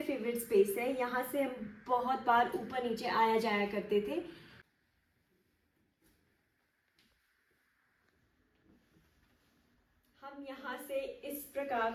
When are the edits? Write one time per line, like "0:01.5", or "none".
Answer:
none